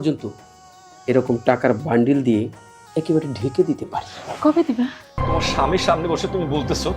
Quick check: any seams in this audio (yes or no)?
yes